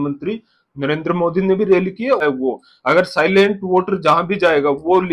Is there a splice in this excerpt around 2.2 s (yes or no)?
yes